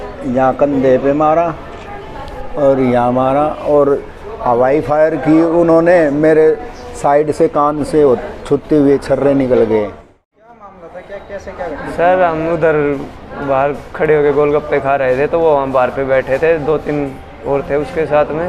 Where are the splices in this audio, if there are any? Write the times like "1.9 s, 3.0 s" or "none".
10.1 s